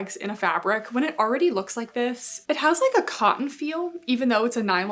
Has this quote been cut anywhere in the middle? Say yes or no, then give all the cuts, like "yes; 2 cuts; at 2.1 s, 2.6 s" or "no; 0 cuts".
no; 0 cuts